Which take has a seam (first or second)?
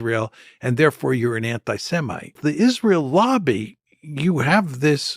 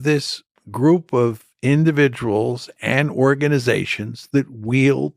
first